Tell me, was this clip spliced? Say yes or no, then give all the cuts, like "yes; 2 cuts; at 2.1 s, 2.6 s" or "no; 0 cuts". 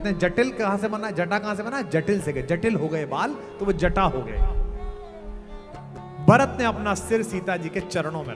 no; 0 cuts